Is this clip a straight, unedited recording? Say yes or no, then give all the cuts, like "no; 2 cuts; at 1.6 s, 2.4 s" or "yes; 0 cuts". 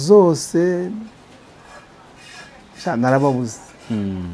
yes; 0 cuts